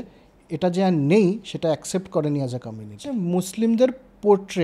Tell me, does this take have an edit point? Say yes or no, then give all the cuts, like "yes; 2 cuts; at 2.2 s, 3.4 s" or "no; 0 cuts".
yes; 1 cut; at 3.1 s